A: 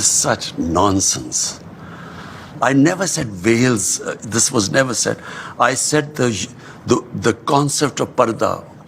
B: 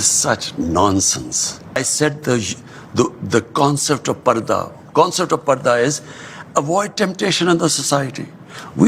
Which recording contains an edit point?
B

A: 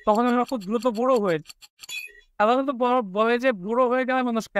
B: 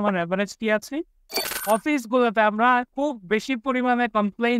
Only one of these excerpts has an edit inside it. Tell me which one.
B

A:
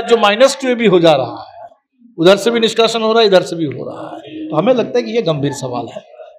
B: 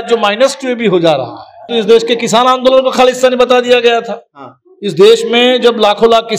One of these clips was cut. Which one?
B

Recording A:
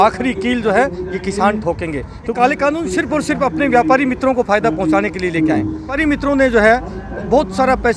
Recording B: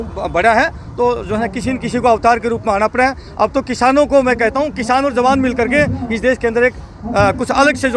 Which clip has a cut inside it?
A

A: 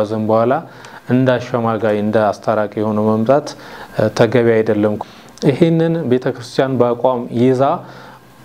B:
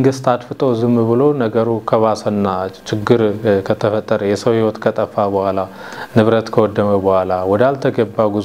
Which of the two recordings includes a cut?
A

